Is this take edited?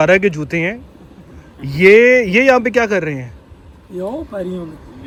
no; 0 cuts

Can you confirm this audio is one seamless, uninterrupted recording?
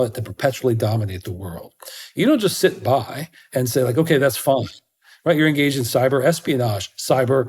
yes; 0 cuts

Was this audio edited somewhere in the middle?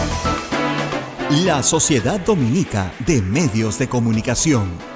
yes; 1 cut; at 0.9 s

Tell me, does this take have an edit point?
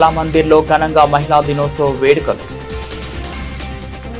yes; 1 cut; at 2.4 s

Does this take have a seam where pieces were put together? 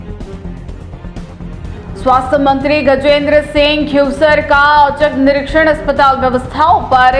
no; 0 cuts

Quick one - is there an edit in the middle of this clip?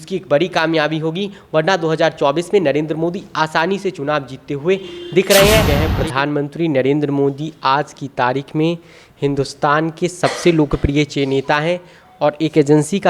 yes; 1 cut; at 5.7 s

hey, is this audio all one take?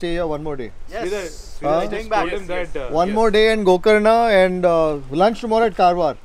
yes; 0 cuts

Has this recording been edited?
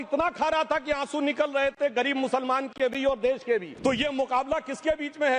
yes; 1 cut; at 3.7 s

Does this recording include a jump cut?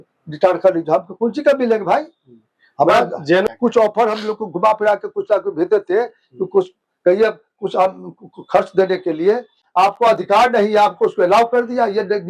yes; 2 cuts; at 3.5 s, 9.6 s

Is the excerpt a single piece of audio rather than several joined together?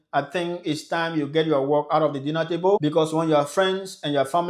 no; 1 cut; at 2.8 s

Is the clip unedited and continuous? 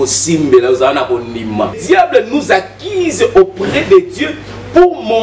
no; 1 cut; at 1.8 s

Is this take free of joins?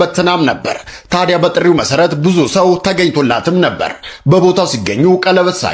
yes; 0 cuts

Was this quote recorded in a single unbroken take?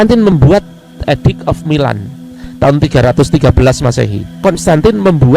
no; 1 cut; at 4.3 s

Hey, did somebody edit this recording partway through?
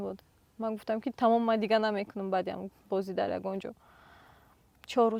no; 0 cuts

